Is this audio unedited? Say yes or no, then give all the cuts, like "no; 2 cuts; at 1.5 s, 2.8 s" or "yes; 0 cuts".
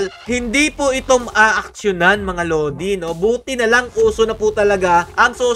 yes; 0 cuts